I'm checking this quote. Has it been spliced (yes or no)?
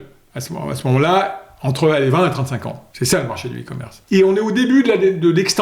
yes